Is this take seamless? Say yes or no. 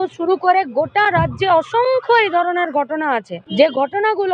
no